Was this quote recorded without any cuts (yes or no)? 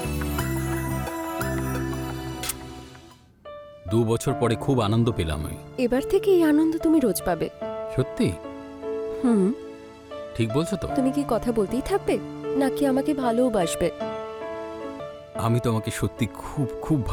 yes